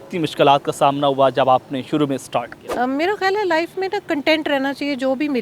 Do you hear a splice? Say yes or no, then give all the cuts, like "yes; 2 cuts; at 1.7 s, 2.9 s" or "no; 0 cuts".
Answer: yes; 1 cut; at 2.6 s